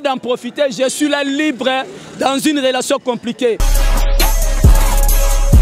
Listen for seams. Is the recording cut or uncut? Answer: cut